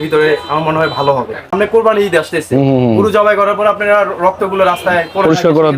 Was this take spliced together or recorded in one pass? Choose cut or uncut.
cut